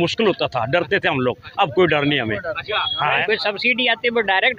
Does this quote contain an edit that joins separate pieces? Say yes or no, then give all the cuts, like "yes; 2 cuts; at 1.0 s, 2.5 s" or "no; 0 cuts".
yes; 1 cut; at 3.2 s